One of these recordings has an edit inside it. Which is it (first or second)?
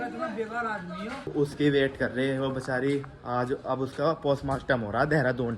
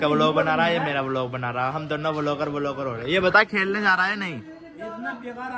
first